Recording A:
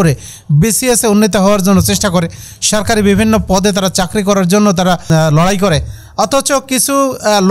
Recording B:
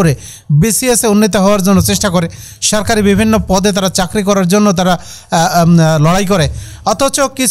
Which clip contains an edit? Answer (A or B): A